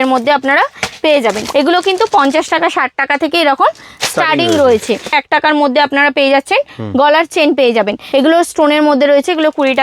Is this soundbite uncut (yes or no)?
no